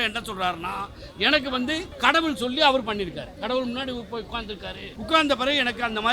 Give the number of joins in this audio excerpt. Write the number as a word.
two